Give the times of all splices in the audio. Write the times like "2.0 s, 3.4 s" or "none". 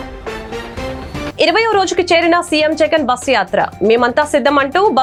none